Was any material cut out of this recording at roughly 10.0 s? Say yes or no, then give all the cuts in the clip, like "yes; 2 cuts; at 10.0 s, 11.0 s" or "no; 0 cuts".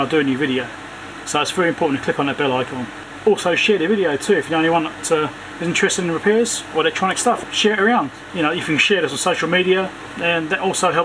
yes; 3 cuts; at 3.1 s, 7.4 s, 10.0 s